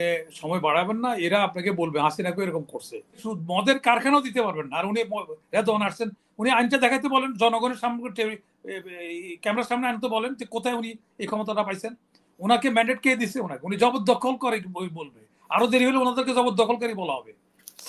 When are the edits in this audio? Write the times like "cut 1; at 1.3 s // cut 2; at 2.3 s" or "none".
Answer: cut 1; at 3.3 s